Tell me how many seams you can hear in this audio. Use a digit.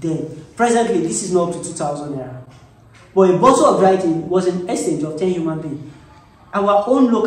0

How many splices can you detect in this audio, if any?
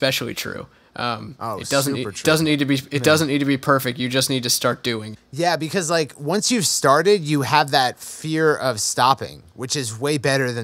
1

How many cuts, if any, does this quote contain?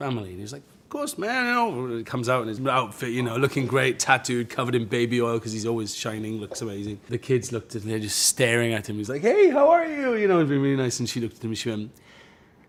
0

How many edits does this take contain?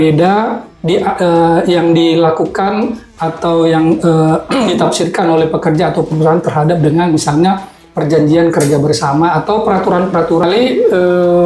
1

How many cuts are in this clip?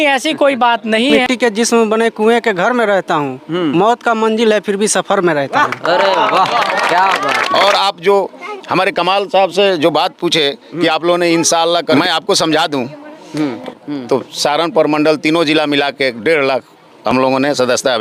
4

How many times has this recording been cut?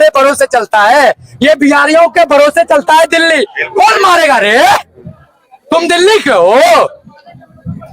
0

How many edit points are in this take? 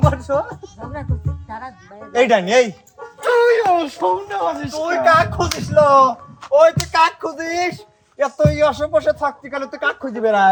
0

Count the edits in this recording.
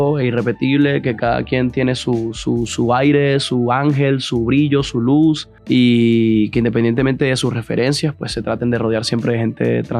1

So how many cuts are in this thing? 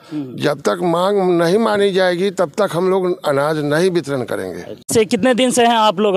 1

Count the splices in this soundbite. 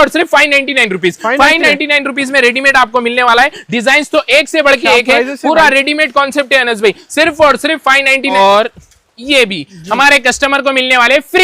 1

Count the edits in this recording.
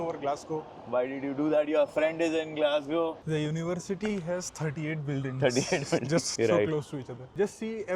2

